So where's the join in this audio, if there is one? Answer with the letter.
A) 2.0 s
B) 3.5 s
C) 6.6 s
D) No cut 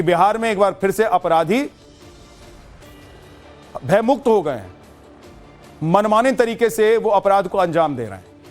A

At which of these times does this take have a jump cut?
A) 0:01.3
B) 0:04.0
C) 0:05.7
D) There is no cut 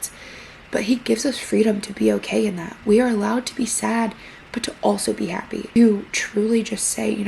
C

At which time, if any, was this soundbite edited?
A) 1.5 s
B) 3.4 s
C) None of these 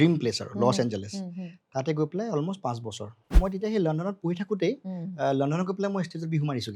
B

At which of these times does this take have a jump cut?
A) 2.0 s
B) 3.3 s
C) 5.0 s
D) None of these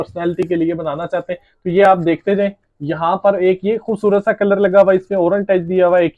D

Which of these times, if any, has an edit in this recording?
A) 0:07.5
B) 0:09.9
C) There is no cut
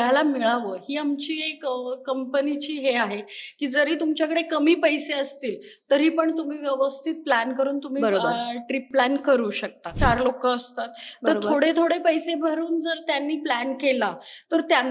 B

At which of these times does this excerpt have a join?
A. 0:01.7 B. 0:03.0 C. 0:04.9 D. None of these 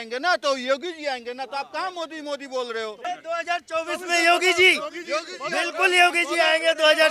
B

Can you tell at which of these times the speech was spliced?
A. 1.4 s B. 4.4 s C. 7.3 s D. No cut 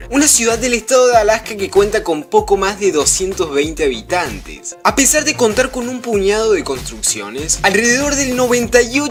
D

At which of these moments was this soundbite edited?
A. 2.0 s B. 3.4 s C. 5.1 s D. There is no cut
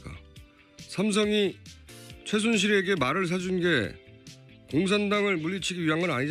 C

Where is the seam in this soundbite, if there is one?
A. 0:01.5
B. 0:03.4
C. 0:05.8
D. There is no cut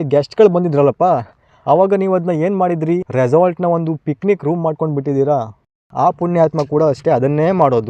C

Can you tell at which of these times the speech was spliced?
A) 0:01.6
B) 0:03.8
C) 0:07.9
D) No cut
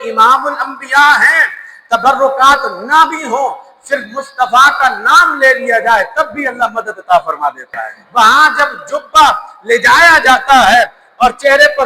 C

